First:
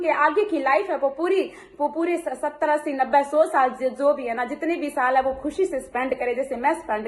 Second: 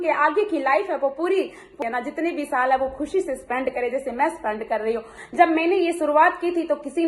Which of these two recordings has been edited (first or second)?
second